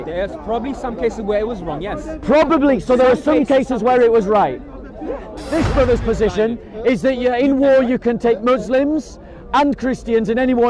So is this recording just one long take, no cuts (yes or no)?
no